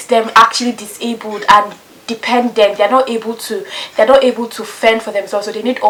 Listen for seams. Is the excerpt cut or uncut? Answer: uncut